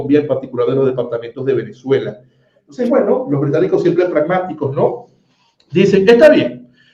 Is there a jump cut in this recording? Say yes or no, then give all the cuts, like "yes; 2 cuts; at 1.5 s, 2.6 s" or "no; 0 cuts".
yes; 1 cut; at 2.6 s